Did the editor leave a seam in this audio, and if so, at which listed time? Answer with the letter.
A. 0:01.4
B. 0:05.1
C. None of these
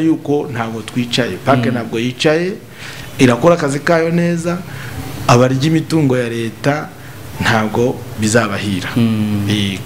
C